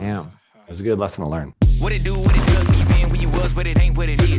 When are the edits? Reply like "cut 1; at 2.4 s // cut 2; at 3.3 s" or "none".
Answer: cut 1; at 1.5 s